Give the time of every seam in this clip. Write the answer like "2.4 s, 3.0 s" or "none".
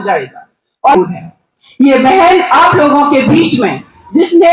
1.0 s

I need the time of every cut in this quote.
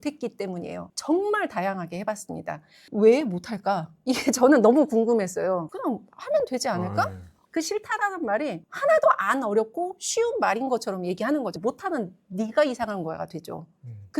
0.9 s, 7.4 s

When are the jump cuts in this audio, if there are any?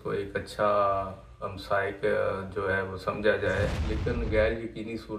3.8 s

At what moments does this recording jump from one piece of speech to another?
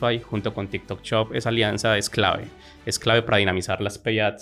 none

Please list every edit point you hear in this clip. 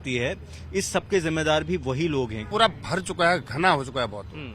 2.5 s

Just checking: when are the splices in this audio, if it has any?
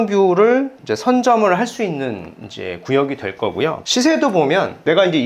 none

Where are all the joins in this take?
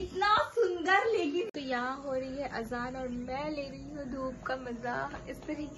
1.5 s

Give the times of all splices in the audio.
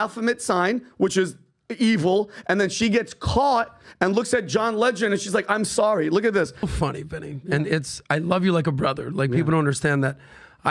6.7 s

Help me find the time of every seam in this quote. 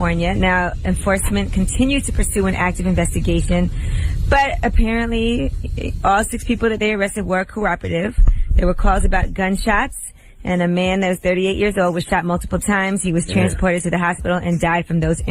13.8 s

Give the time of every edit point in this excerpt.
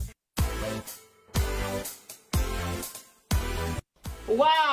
3.8 s

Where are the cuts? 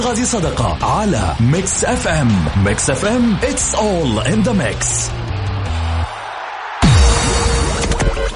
6.8 s

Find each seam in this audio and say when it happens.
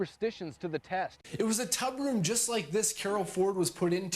1.2 s

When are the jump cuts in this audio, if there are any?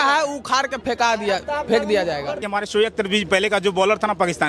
2.4 s

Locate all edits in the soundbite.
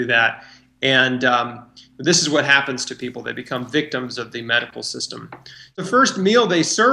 5.8 s

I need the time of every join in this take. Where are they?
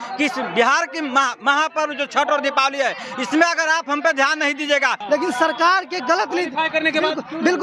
5.0 s

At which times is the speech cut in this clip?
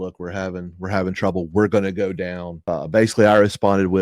2.5 s

